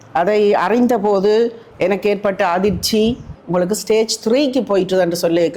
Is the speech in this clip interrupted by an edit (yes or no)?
yes